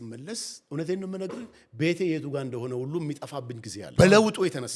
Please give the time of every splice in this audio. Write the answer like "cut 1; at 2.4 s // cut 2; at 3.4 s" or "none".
cut 1; at 3.8 s

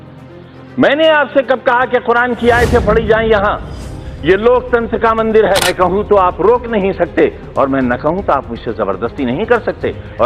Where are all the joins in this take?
cut 1; at 5.7 s

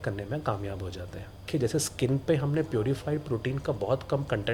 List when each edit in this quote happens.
cut 1; at 1.5 s

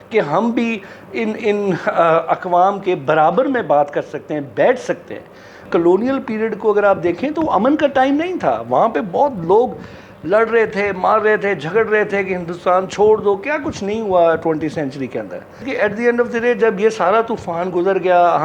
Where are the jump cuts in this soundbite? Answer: cut 1; at 5.6 s // cut 2; at 15.7 s

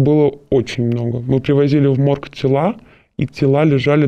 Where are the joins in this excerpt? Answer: none

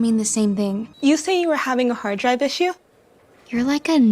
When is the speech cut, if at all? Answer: cut 1; at 0.9 s

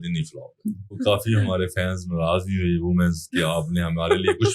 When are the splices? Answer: cut 1; at 1.0 s

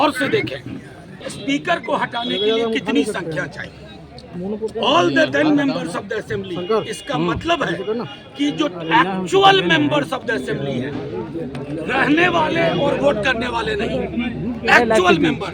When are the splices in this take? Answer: cut 1; at 1.2 s

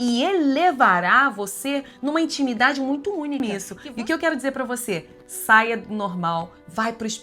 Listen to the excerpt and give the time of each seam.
cut 1; at 3.4 s

